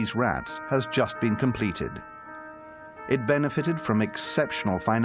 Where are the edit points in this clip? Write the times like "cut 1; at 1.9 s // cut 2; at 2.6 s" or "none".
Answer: none